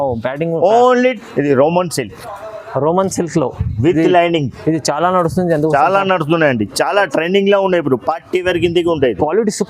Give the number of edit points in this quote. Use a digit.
1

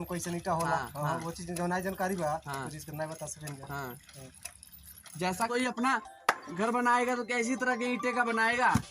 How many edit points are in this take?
1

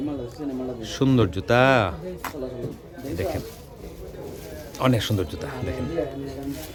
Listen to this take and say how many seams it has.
0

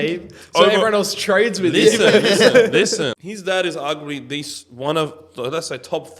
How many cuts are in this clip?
1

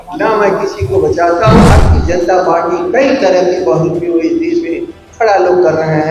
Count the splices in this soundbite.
1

